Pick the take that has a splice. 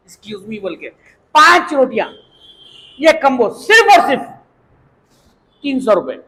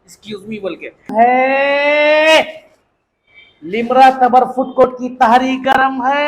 second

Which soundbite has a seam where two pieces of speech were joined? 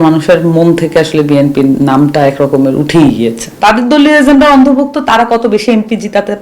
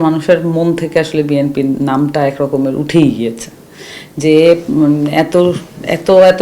first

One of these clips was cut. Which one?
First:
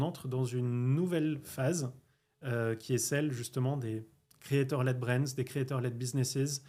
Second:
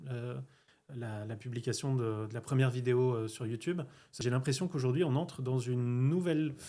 second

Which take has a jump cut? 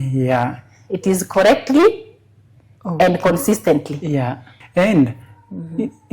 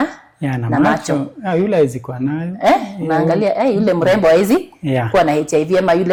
first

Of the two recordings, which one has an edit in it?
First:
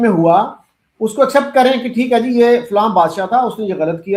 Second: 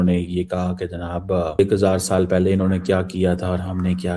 second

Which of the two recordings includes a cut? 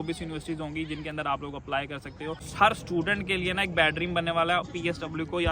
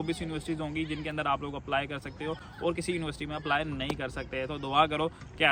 first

